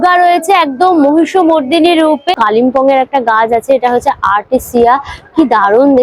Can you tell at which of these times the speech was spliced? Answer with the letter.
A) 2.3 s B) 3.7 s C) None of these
A